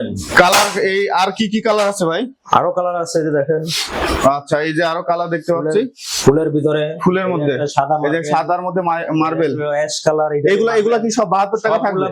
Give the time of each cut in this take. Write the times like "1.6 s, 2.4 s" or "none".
none